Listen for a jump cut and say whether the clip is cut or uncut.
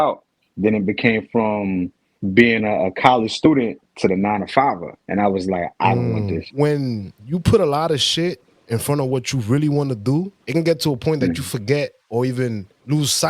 cut